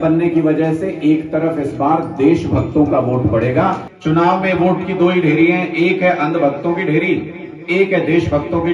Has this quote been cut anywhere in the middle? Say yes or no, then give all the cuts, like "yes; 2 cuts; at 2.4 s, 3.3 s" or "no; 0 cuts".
yes; 1 cut; at 3.9 s